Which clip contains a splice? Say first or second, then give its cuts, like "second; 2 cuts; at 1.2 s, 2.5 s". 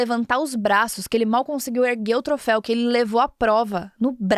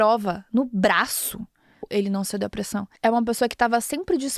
second; 2 cuts; at 1.8 s, 2.9 s